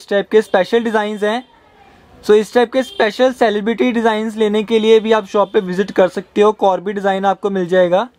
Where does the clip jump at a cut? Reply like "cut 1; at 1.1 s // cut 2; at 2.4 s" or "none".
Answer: none